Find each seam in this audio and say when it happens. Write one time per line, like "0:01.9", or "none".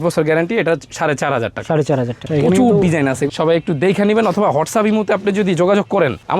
0:02.2
0:03.3